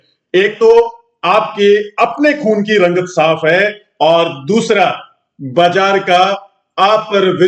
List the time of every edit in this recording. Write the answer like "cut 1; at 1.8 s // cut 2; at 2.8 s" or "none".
none